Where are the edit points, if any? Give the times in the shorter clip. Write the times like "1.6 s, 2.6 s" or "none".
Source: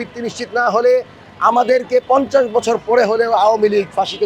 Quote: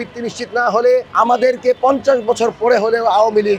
1.1 s